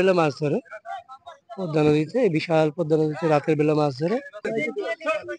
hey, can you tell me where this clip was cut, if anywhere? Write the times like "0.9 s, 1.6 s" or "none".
4.4 s